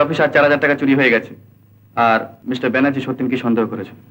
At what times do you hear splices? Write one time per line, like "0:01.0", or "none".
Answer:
0:02.3

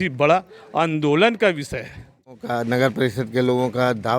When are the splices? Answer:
0:02.4

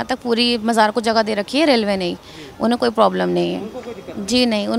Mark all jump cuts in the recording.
none

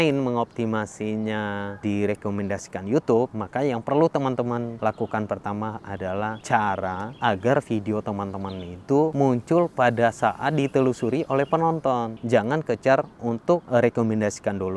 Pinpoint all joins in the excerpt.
0:01.8
0:03.4
0:04.7
0:06.2
0:07.1
0:09.1
0:12.2
0:13.6

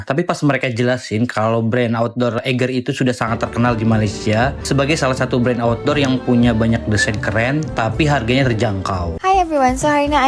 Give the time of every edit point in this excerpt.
0:09.1

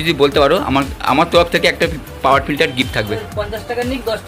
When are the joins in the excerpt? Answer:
0:03.2

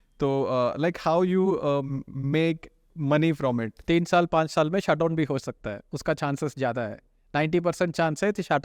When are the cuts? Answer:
0:03.7

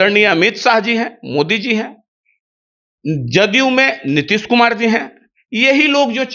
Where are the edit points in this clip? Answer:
none

